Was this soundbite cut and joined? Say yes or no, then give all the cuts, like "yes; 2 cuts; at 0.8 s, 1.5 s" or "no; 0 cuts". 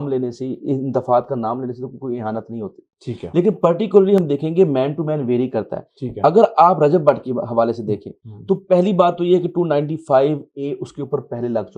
no; 0 cuts